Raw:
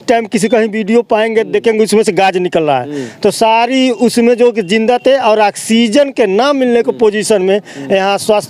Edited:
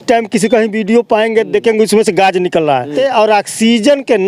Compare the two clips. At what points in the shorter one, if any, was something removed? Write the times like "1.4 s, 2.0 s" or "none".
2.9 s